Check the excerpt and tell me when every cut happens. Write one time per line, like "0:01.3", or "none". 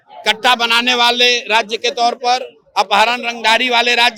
none

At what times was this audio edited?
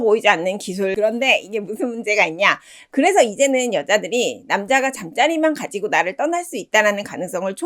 0:01.0

